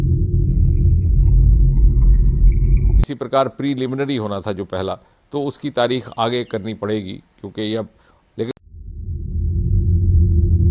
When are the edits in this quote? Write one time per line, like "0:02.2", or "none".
0:08.5